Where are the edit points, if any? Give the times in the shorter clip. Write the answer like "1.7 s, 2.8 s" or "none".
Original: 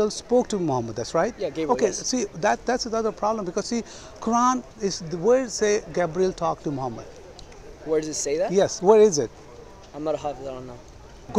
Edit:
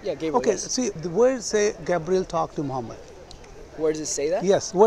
1.0 s